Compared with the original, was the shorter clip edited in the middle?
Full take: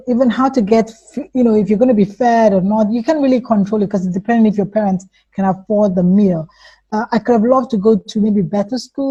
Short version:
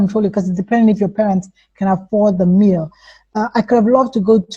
no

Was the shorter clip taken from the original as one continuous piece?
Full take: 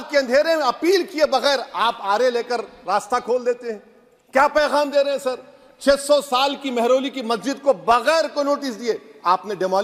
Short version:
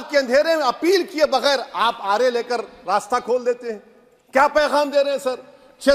yes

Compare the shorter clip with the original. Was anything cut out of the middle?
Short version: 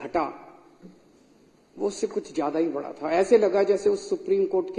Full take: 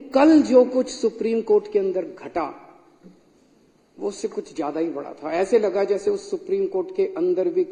no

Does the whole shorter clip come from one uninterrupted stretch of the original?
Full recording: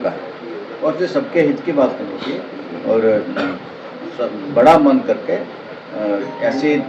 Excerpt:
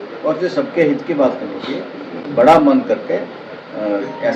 no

